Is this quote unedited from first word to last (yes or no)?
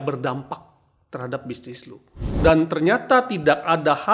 no